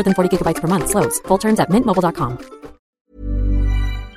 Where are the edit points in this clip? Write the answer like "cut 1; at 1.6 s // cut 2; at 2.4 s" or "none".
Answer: cut 1; at 3.1 s

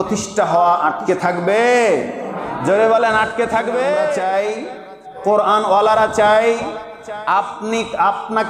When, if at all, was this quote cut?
cut 1; at 4.2 s

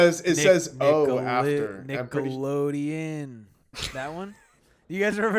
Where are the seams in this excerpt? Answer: none

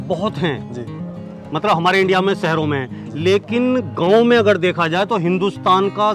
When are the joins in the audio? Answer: none

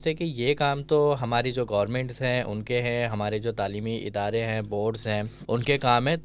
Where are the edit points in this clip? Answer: cut 1; at 5.3 s

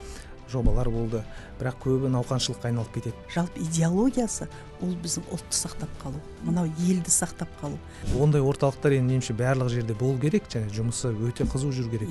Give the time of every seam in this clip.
cut 1; at 3.1 s // cut 2; at 8.0 s

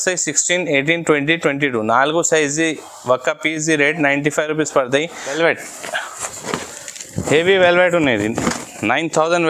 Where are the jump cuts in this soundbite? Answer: cut 1; at 5.2 s

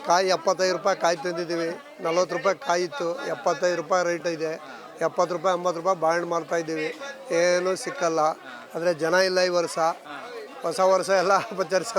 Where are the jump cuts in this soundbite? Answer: none

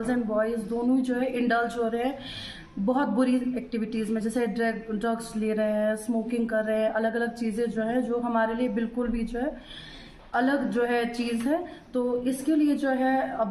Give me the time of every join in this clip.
none

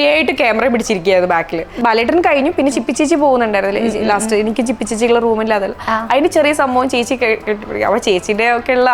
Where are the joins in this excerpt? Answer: cut 1; at 1.7 s

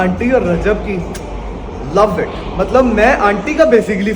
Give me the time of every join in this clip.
none

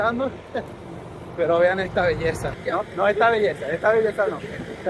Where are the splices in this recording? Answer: cut 1; at 2.5 s

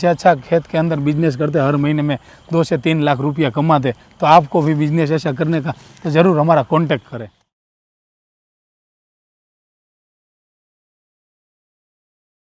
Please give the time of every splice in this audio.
none

